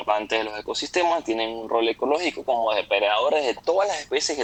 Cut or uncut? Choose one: uncut